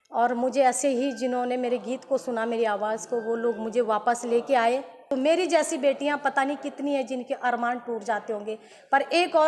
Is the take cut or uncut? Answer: cut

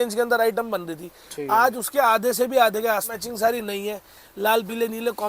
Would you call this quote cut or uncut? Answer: cut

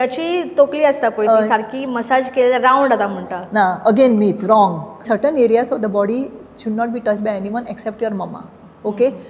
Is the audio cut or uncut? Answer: cut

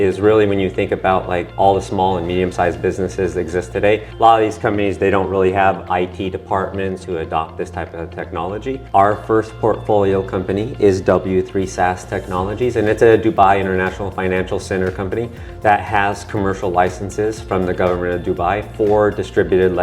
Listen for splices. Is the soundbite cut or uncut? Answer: cut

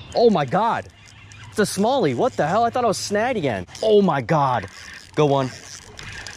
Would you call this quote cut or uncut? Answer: cut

